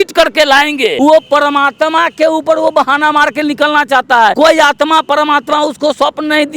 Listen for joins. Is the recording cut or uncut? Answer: cut